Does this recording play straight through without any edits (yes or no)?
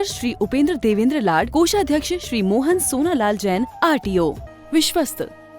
no